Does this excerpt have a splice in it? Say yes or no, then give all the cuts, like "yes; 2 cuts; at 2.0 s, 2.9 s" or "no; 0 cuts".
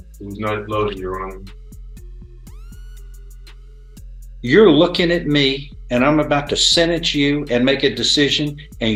no; 0 cuts